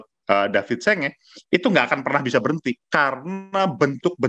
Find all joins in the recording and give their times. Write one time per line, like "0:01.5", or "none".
0:02.8

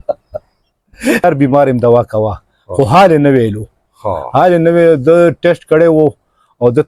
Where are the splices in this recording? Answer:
0:01.2

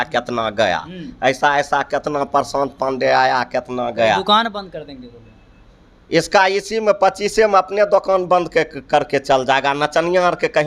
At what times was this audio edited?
none

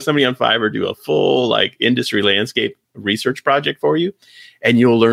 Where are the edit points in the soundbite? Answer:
none

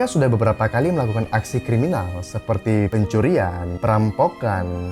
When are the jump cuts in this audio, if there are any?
0:02.9

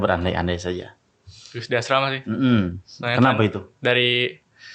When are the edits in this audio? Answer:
none

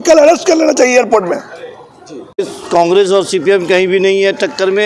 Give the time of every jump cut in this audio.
0:02.4

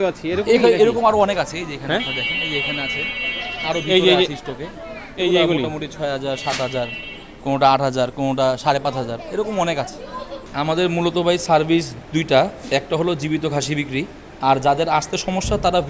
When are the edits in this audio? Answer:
0:10.4
0:14.2

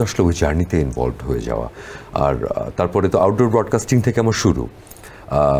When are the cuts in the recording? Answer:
none

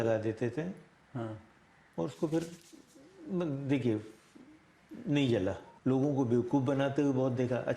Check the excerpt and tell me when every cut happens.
0:05.7

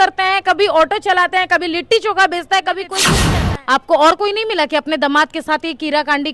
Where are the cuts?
0:03.1

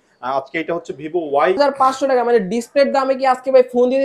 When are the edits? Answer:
0:01.6

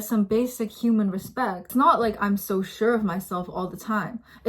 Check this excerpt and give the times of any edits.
0:01.6

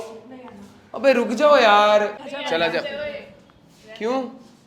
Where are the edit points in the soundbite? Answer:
0:02.3

